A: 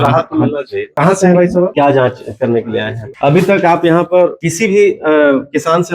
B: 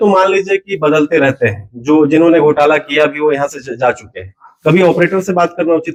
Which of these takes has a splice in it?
A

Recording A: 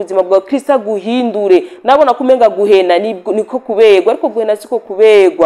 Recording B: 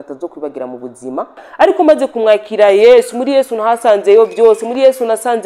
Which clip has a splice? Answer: B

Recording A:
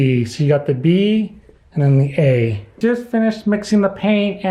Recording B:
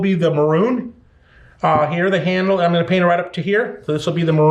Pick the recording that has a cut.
A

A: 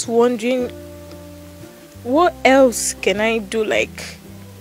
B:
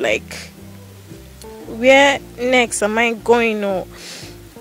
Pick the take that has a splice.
A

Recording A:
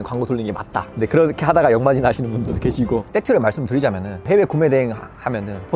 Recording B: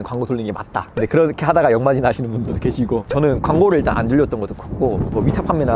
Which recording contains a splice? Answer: A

